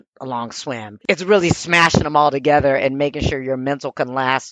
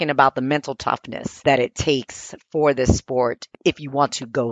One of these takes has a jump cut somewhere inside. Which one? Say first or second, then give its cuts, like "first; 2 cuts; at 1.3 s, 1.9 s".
second; 1 cut; at 1.4 s